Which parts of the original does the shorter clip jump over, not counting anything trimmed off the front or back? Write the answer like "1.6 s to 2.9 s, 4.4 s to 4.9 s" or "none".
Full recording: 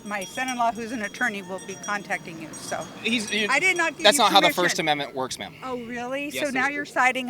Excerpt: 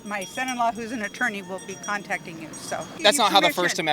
3.0 s to 4.0 s